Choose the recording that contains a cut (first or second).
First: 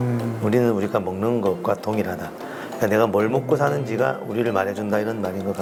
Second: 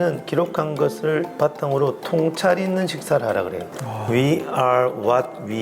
second